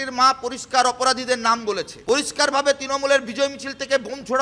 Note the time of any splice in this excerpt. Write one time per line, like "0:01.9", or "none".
0:01.9